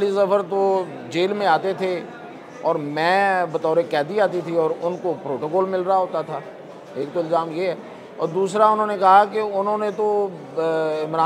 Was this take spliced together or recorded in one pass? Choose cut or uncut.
uncut